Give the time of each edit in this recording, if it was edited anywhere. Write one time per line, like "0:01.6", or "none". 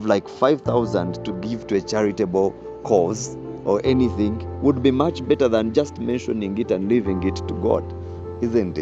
none